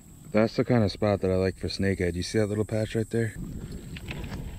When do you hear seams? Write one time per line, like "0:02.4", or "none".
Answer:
0:03.3